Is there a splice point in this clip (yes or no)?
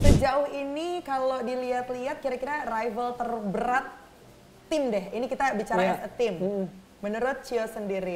no